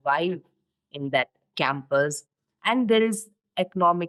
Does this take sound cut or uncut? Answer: uncut